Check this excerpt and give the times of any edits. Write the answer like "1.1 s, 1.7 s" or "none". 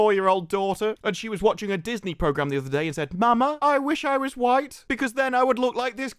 none